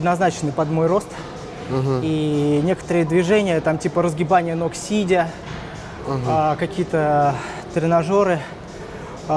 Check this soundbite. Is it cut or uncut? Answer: uncut